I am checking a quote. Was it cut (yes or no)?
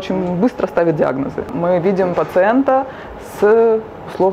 yes